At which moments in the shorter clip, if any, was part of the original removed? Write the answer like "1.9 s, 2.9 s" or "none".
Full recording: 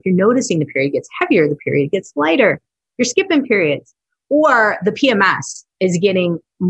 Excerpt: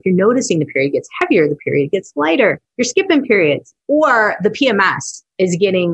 2.7 s, 3.7 s